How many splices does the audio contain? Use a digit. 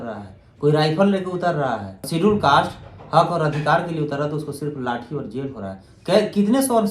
1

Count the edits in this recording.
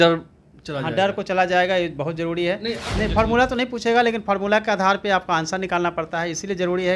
1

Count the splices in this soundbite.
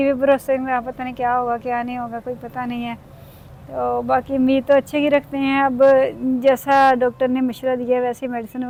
0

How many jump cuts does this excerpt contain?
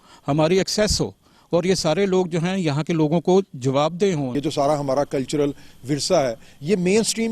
1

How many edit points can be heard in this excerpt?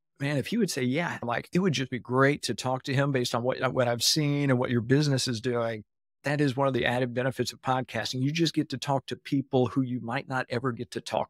2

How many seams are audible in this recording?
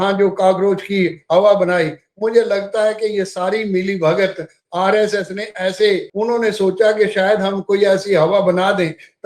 1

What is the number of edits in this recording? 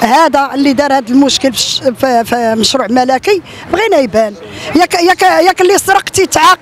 0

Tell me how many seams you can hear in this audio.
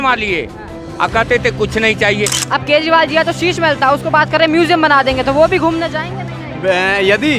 1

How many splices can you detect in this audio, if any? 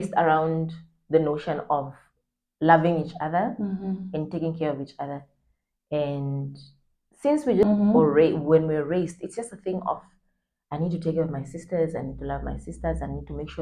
0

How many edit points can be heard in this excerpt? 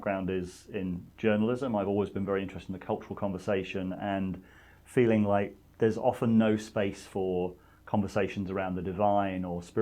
1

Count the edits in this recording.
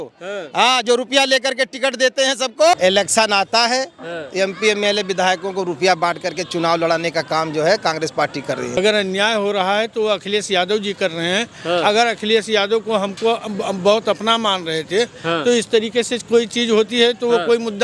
2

